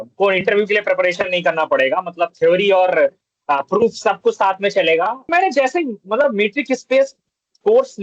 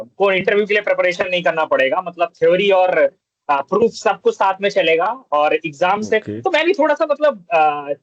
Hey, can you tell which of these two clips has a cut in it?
first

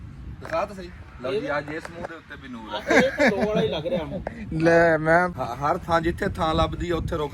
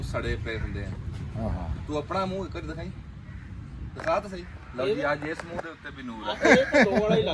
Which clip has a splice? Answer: first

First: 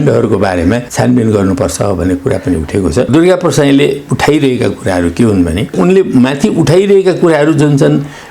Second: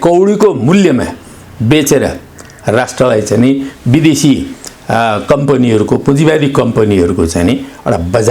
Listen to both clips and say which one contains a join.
first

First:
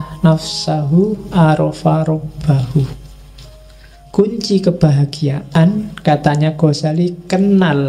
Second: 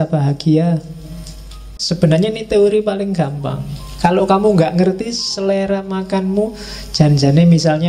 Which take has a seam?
second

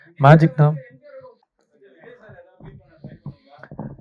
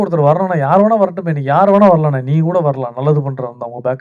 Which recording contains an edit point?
first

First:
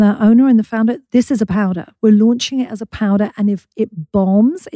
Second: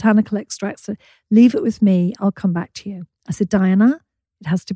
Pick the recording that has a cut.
first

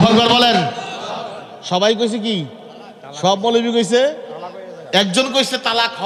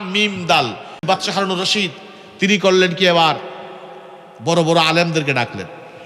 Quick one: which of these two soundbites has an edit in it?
second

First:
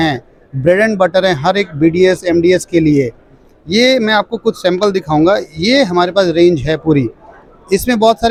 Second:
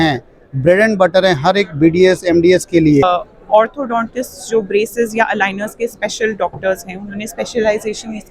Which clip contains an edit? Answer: second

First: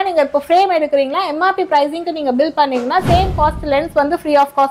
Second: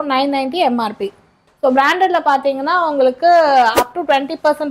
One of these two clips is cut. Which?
second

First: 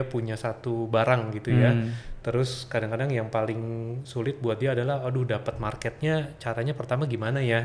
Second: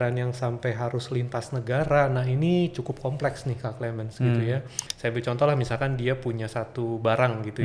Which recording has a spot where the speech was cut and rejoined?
second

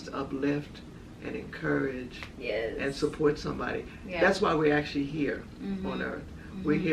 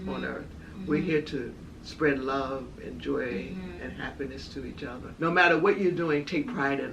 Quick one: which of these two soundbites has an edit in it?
second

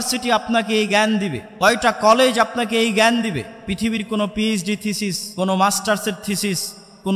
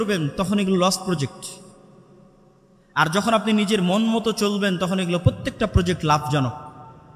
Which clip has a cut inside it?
first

